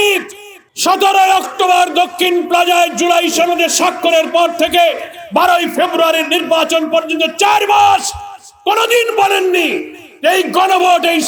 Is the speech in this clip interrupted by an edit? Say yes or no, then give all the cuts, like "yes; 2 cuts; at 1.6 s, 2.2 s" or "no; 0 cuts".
no; 0 cuts